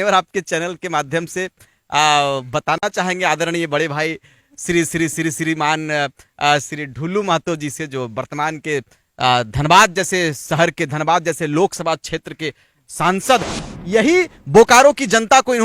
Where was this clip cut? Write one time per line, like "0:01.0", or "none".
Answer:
0:13.7